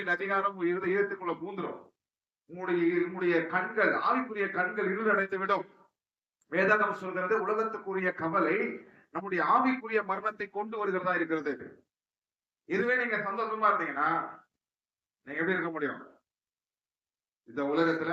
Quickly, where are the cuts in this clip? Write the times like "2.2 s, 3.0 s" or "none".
none